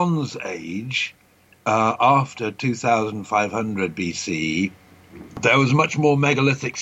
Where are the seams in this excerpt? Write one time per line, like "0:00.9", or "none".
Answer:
none